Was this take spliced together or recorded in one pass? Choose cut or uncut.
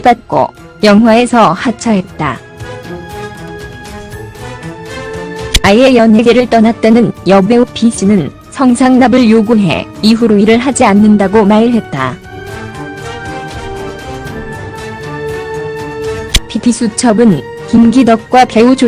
cut